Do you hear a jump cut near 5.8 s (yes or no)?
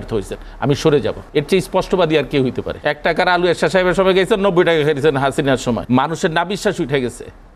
yes